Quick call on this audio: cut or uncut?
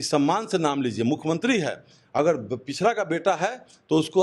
uncut